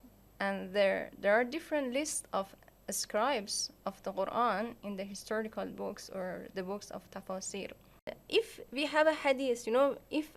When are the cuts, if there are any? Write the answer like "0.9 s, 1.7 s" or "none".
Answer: 8.2 s